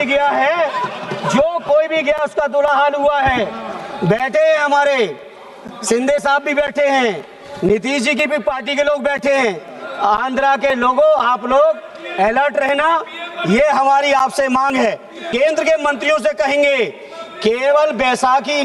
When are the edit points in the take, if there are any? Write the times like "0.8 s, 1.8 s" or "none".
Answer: 15.3 s